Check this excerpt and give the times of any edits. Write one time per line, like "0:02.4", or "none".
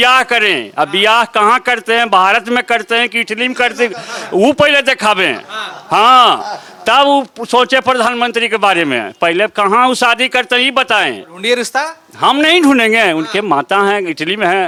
none